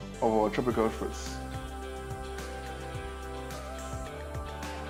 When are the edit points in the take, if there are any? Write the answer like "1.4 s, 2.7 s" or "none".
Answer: none